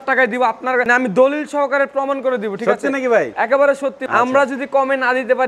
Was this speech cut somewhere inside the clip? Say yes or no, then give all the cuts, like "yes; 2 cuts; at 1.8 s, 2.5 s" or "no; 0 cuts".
yes; 1 cut; at 4.0 s